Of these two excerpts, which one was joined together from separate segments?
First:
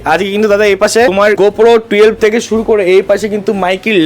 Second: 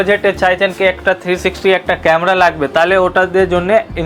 first; 1 cut; at 1.3 s

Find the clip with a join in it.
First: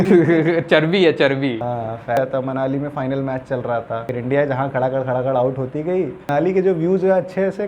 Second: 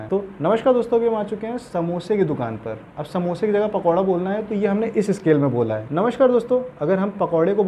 first; 1 cut; at 2.2 s

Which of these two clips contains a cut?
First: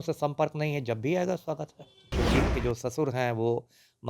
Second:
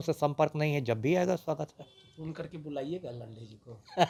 first; 1 cut; at 2.1 s

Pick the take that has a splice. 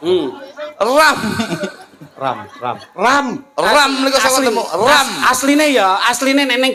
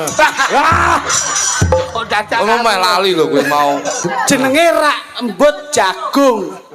second; 1 cut; at 4.0 s

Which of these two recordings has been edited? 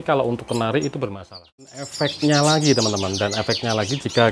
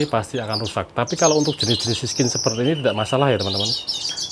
first; 1 cut; at 1.9 s

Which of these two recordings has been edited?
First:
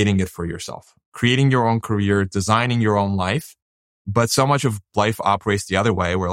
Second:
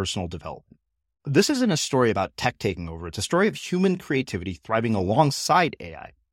first; 1 cut; at 3.9 s

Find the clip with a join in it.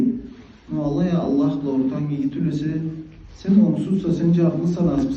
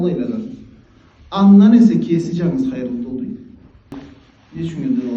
second; 1 cut; at 3.9 s

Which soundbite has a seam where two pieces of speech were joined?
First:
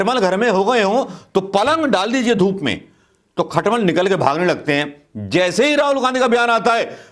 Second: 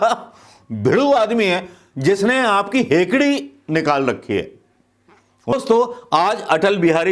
second; 1 cut; at 5.5 s

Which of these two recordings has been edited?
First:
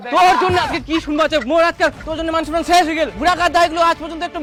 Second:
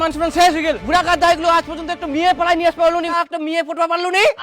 second; 1 cut; at 3.1 s

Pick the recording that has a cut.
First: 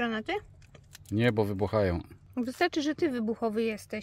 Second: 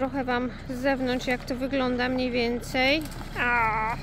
first; 1 cut; at 2.1 s

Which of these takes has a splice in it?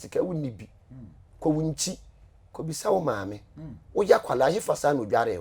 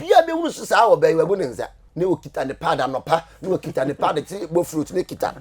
second; 1 cut; at 1.8 s

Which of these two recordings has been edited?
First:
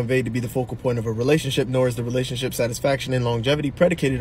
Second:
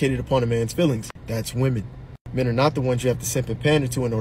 second; 1 cut; at 1.3 s

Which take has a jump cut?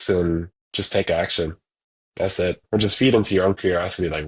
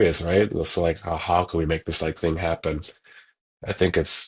first; 1 cut; at 2.6 s

